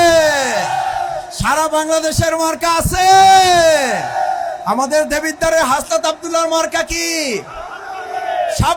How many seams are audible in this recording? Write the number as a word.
zero